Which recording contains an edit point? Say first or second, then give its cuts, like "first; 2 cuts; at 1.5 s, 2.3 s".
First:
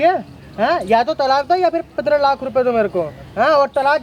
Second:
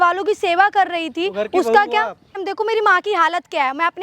second; 1 cut; at 2.5 s